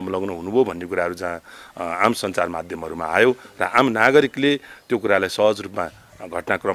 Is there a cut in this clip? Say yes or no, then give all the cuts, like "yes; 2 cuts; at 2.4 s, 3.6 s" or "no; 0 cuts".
no; 0 cuts